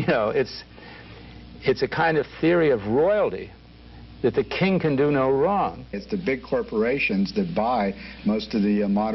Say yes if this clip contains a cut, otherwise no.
yes